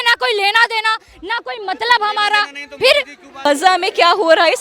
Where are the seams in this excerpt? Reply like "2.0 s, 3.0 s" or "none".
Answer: 3.2 s